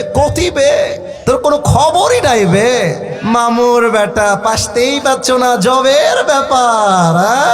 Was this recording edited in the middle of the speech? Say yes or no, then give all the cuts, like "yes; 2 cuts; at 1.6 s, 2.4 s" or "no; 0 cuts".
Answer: yes; 2 cuts; at 1.1 s, 3.1 s